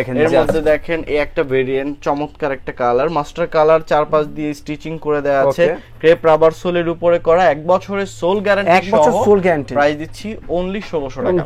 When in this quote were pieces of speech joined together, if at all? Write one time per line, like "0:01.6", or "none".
none